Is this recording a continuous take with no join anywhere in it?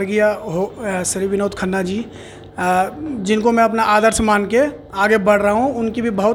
yes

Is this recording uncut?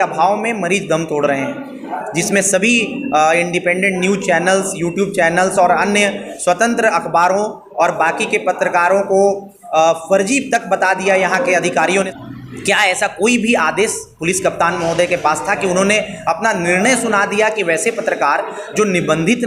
no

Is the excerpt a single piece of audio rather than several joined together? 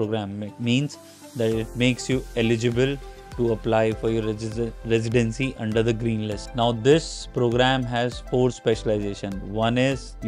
yes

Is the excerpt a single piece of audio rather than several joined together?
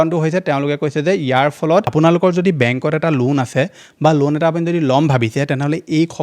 no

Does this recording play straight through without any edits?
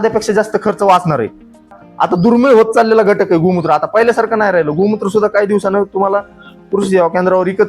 no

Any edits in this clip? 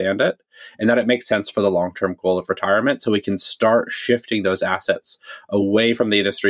no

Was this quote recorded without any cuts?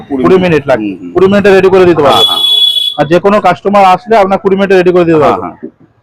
yes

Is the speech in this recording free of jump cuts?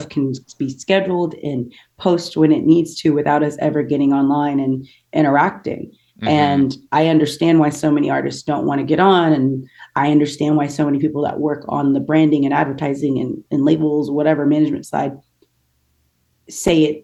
yes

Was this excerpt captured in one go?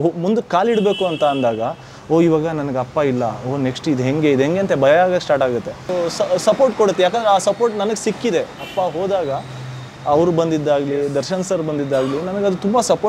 no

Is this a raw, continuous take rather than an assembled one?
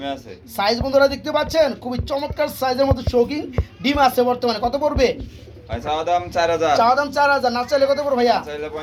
yes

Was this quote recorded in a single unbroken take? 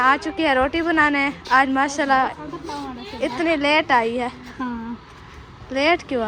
yes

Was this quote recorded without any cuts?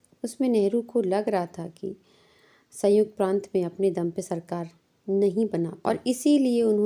no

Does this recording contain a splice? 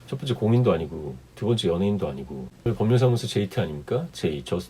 yes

